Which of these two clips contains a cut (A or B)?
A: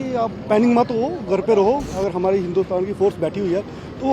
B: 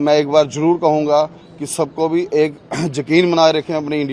A